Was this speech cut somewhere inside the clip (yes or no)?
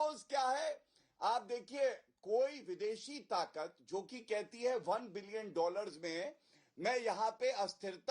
no